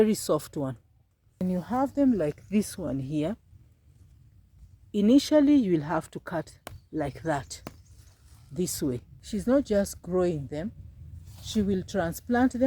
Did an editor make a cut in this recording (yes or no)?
yes